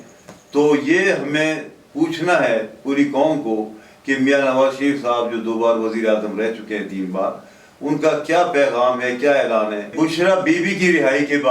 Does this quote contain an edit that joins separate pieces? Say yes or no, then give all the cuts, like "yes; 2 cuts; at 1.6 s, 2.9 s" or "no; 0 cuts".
yes; 1 cut; at 9.9 s